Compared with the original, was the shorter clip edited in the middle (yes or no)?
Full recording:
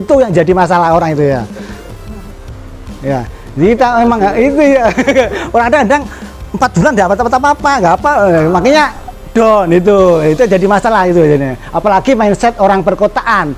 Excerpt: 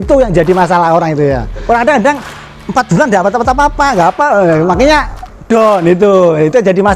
yes